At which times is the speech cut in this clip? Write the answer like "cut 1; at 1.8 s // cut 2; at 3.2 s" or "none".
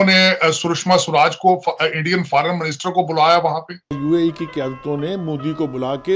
cut 1; at 4.0 s